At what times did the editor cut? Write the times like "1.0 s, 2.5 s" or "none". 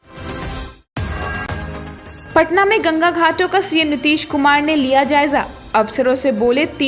2.1 s